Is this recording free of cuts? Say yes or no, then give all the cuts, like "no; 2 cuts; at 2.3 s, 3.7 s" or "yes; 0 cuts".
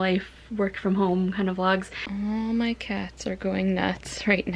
no; 1 cut; at 2.0 s